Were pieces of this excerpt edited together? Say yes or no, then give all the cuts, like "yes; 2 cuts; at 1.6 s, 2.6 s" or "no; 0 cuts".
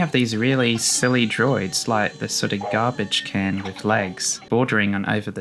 yes; 1 cut; at 4.5 s